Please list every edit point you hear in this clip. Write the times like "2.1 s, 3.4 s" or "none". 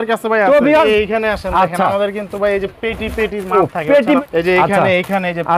0.9 s, 4.2 s